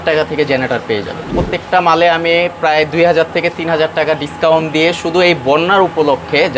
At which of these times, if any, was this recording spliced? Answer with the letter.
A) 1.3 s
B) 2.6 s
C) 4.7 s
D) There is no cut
A